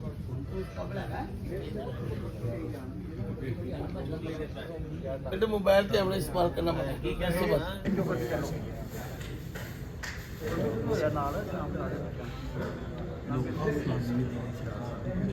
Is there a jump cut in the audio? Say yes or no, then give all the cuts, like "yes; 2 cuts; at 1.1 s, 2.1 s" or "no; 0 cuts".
no; 0 cuts